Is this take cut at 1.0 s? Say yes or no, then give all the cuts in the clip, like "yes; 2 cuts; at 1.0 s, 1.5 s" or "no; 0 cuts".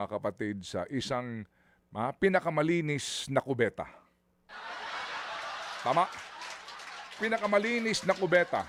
no; 0 cuts